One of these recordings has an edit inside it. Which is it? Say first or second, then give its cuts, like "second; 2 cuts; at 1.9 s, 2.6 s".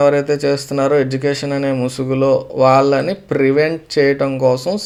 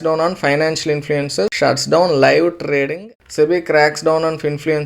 second; 2 cuts; at 1.5 s, 3.2 s